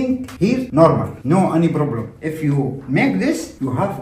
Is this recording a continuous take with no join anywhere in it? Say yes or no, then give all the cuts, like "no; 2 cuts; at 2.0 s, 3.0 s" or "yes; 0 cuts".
no; 1 cut; at 2.1 s